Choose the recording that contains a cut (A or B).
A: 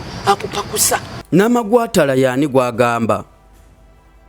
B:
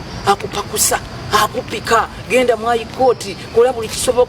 B